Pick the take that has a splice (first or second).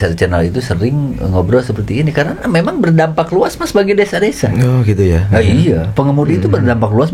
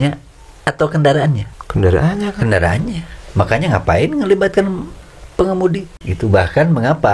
second